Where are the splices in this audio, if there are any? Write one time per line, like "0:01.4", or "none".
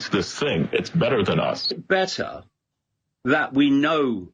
0:01.8